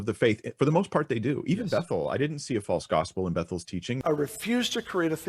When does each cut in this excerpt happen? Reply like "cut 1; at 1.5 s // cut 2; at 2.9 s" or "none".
cut 1; at 4.0 s